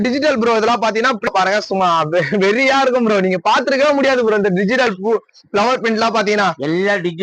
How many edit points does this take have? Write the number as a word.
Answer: one